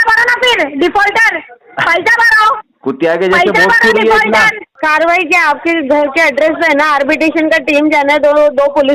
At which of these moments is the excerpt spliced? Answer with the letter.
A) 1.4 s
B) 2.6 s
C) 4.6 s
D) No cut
C